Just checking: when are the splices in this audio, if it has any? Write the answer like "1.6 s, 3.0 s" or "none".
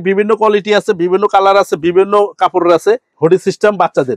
3.0 s